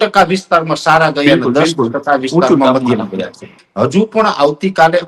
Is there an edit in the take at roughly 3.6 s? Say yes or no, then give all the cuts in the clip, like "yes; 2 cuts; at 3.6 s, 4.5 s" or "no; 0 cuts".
yes; 1 cut; at 3.6 s